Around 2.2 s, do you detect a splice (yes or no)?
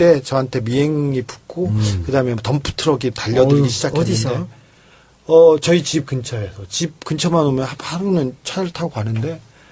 yes